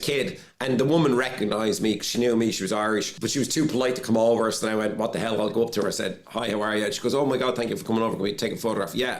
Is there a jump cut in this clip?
yes; 1 cut; at 3.2 s

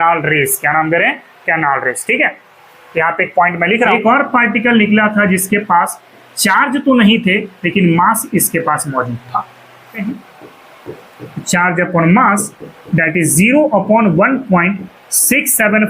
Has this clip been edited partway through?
yes; 2 cuts; at 3.9 s, 10.0 s

